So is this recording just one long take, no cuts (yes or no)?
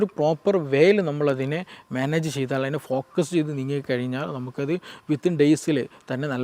yes